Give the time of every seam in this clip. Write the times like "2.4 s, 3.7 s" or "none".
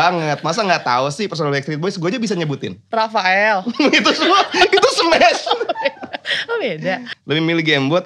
7.1 s